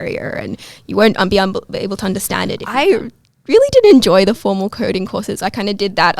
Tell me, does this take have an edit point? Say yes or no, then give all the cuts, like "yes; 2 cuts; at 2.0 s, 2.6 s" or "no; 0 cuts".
yes; 1 cut; at 2.6 s